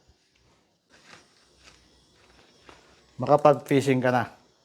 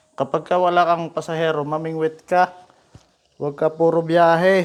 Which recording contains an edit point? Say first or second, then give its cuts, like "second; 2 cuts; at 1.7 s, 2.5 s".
first; 1 cut; at 0.9 s